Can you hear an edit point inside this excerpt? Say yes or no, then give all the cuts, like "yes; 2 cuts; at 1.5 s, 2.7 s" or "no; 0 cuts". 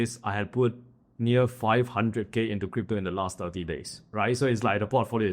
yes; 1 cut; at 4.0 s